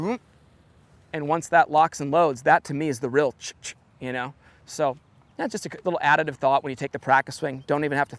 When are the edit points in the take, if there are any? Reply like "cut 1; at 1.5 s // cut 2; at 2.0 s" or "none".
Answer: none